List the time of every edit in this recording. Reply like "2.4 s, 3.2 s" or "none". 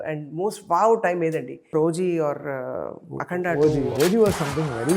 1.7 s, 3.9 s